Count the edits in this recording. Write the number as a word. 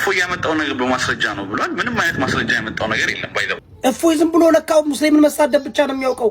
one